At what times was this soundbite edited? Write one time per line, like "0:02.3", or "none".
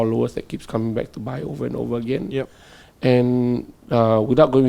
none